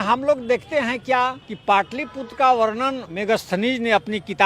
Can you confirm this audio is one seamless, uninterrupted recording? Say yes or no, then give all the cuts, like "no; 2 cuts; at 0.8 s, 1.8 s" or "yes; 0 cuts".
no; 2 cuts; at 1.5 s, 3.1 s